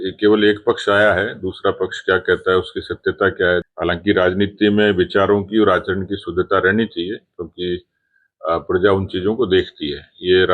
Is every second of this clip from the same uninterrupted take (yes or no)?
no